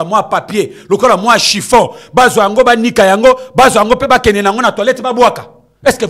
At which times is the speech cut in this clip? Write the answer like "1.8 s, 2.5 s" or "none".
none